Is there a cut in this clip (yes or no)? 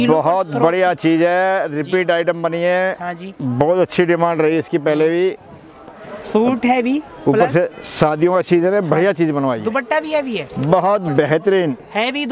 no